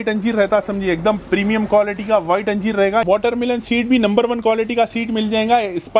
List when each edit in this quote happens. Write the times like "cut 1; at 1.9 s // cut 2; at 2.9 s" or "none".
cut 1; at 3.0 s